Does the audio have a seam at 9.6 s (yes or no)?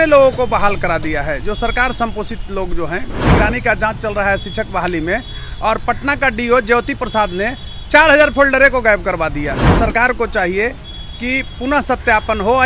yes